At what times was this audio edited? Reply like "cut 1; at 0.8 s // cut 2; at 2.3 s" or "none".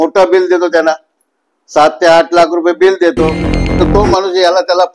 cut 1; at 3.8 s